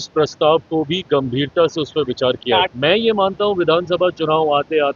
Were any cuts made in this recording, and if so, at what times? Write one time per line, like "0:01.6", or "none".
0:02.7